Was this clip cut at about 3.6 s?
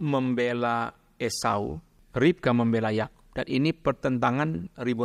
no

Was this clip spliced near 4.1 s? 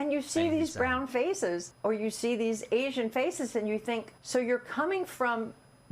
yes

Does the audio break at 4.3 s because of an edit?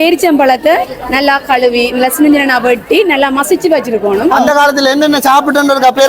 yes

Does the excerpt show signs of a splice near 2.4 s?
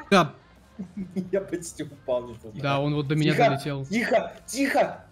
yes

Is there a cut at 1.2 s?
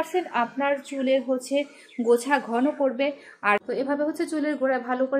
no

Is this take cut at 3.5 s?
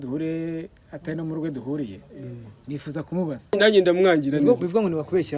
yes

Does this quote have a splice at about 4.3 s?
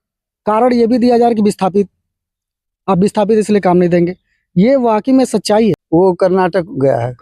no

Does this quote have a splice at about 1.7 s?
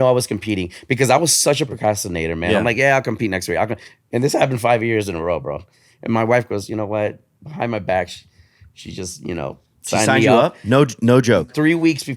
yes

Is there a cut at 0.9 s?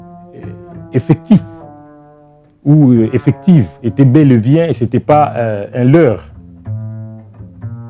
yes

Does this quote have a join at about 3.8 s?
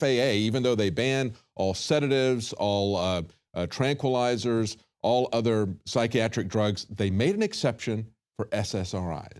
no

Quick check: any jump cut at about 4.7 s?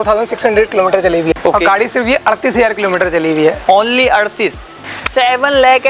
yes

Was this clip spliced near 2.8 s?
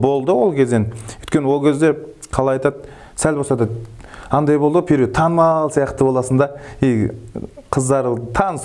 no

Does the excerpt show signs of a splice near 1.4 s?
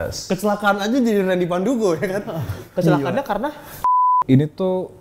no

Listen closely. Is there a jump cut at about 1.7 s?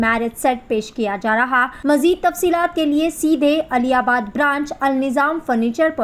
yes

